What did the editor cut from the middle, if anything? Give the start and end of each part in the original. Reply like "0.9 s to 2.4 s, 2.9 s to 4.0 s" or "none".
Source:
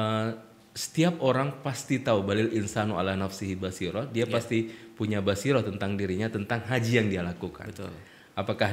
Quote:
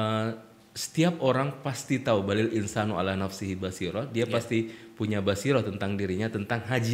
none